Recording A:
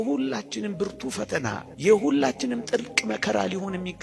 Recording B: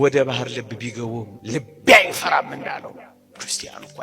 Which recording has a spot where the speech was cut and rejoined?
B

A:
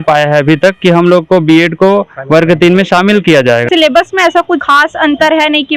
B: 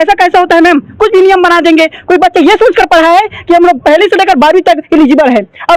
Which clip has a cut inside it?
A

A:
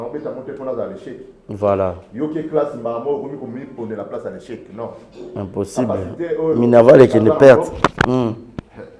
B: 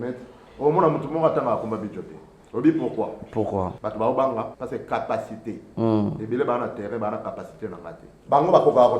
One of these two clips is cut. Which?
B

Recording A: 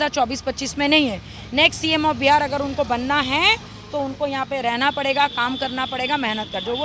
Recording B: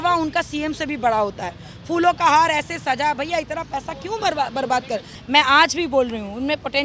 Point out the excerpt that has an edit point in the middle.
B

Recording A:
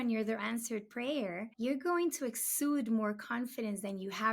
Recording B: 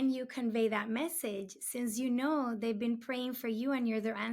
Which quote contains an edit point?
A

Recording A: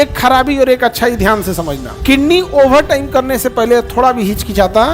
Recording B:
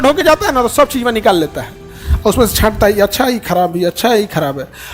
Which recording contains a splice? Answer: A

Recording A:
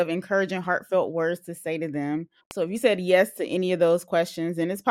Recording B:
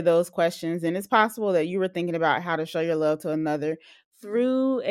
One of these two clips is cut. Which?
A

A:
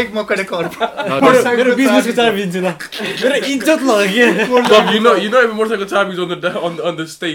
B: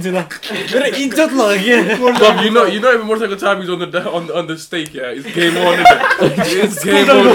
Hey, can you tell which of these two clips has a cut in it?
A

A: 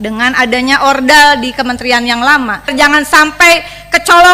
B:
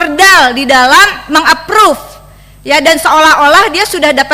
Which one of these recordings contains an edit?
A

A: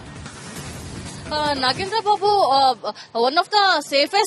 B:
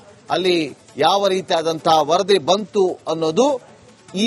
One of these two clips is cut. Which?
A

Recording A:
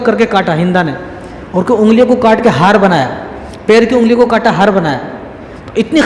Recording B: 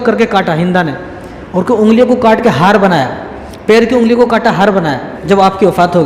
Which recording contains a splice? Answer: B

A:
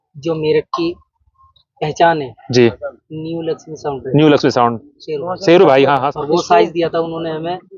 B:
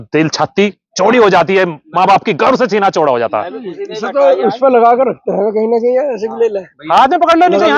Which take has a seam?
A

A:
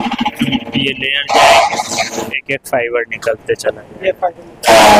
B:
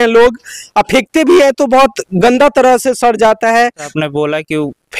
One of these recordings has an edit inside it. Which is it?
B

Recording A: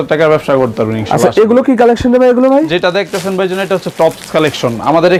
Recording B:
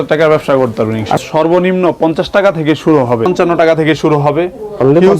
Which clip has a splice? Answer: B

